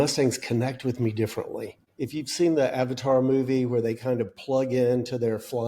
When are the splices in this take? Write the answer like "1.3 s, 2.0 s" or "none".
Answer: 1.8 s

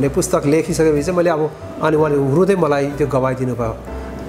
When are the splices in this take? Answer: 1.6 s

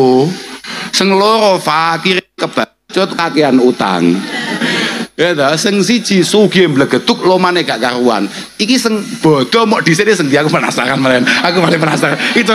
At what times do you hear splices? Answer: none

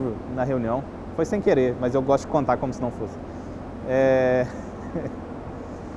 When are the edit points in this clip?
none

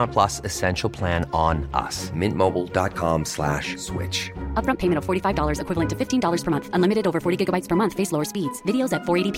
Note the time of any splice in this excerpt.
none

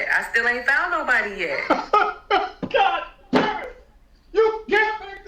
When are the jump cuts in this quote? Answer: 1.6 s

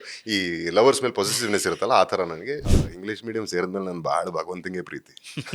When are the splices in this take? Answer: 2.9 s

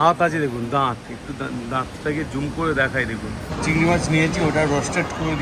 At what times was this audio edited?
3.5 s

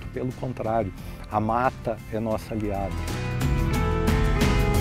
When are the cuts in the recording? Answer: none

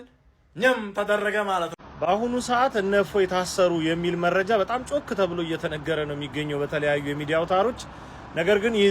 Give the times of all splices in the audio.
1.8 s

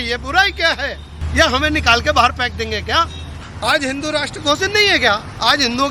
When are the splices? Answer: 1.2 s, 3.4 s

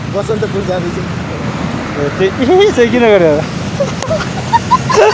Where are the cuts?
none

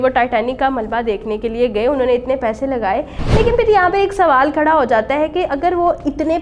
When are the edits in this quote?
none

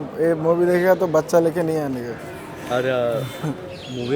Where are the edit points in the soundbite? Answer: none

